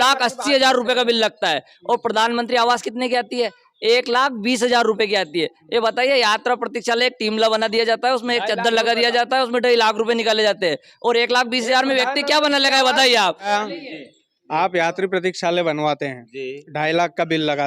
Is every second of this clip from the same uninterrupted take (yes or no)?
no